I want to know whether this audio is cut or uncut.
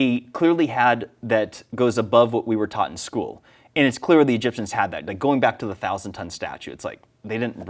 uncut